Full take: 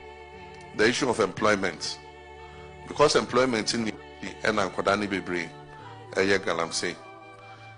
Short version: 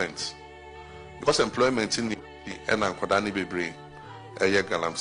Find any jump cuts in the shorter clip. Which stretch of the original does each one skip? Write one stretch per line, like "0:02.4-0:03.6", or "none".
0:02.9-0:03.0